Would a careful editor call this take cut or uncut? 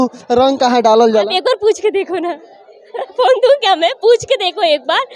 uncut